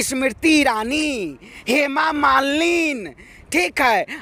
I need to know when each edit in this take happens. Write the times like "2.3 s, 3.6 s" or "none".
none